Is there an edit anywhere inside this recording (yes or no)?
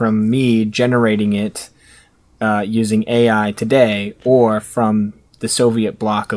no